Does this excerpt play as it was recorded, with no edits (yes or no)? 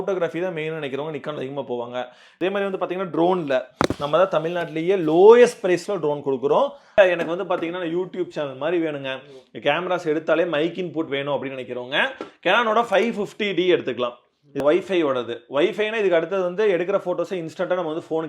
no